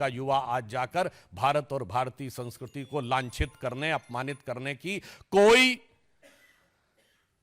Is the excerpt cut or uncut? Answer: uncut